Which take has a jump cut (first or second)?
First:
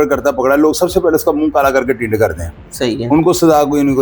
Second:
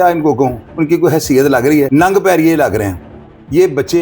second